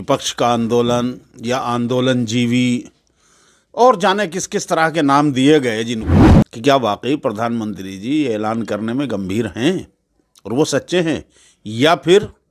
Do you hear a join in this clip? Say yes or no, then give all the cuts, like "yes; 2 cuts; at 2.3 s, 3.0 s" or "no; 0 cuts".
yes; 1 cut; at 6.1 s